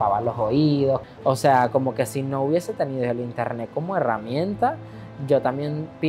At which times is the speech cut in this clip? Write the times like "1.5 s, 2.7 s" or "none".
1.0 s